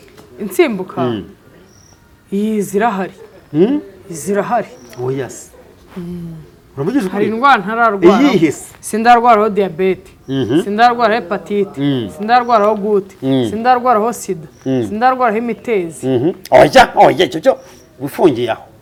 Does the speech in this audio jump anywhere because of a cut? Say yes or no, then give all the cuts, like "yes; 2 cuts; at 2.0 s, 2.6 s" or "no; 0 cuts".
no; 0 cuts